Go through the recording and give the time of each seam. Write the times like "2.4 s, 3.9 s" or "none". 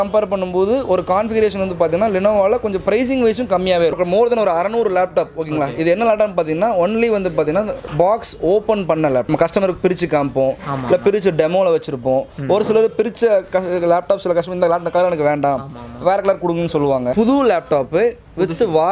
3.9 s, 9.3 s, 17.1 s